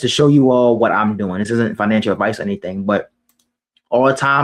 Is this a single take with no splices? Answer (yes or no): yes